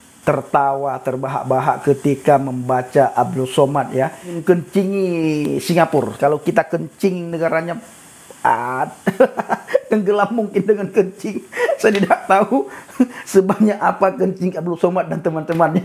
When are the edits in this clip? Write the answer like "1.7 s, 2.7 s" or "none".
4.3 s, 6.1 s